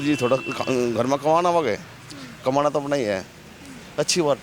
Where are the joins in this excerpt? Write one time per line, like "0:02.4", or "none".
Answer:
none